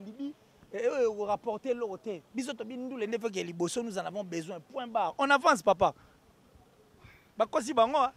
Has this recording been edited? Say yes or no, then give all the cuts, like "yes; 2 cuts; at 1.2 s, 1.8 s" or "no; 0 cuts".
no; 0 cuts